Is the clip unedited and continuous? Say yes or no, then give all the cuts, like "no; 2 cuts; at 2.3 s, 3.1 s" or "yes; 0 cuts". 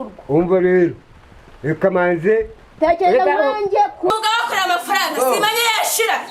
no; 1 cut; at 4.1 s